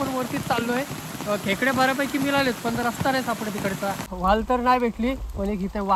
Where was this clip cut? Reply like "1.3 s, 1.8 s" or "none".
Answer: 4.0 s